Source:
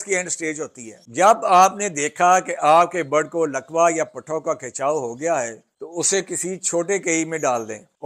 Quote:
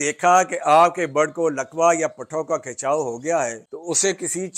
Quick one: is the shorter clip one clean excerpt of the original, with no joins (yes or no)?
no